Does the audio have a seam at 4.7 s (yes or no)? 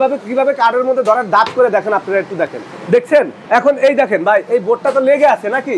no